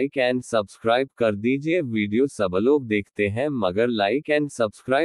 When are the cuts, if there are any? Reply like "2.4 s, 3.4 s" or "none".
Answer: none